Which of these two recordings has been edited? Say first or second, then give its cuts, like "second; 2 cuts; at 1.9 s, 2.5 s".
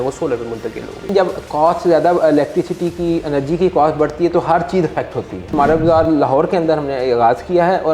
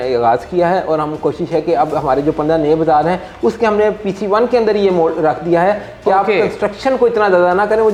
first; 2 cuts; at 1.1 s, 5.5 s